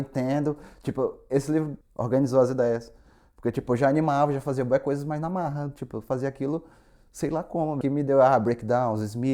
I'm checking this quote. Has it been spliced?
yes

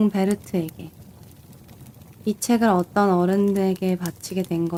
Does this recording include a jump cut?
no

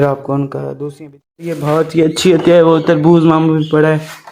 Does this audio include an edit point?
yes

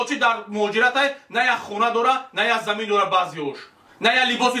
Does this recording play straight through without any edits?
yes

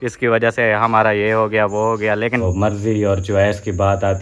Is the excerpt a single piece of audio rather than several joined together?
no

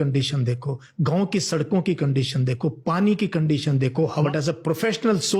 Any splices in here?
yes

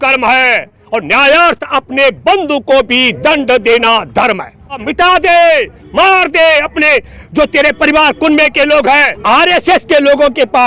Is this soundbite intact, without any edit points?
no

